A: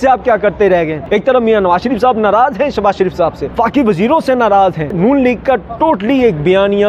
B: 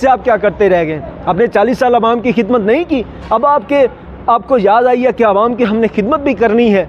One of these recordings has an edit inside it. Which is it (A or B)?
A